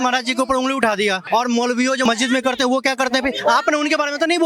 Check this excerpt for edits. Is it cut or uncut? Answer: cut